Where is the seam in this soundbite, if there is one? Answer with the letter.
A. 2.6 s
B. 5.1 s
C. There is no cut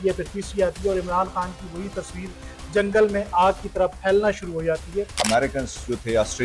B